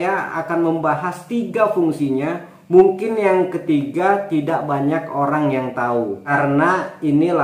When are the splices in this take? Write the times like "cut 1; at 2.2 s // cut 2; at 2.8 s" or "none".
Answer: cut 1; at 6.2 s